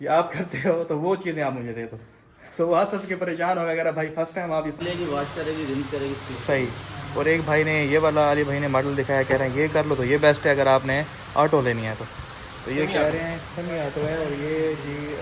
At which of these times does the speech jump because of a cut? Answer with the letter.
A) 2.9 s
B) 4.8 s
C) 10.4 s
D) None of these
B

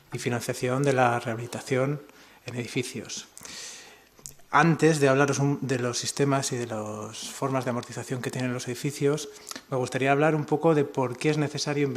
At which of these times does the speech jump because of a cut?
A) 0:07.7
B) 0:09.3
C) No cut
A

